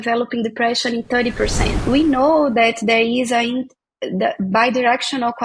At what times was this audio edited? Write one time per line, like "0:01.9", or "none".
0:01.8